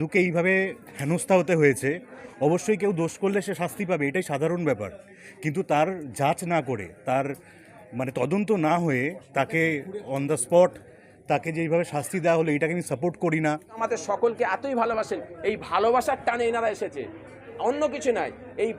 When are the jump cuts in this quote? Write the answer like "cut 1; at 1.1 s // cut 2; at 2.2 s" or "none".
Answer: cut 1; at 13.8 s